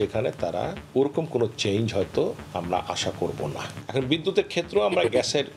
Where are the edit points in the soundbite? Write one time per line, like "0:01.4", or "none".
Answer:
none